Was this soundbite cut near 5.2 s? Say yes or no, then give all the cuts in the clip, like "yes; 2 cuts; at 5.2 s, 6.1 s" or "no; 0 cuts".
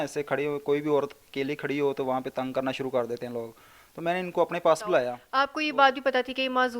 yes; 1 cut; at 5.2 s